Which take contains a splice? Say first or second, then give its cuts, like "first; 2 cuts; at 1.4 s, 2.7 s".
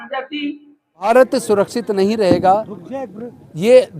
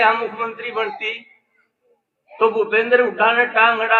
first; 1 cut; at 1.1 s